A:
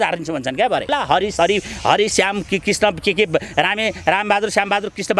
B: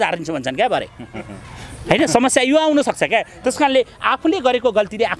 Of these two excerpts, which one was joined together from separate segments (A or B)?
A